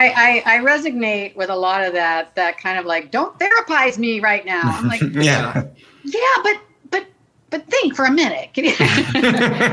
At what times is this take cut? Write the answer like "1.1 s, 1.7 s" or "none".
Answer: none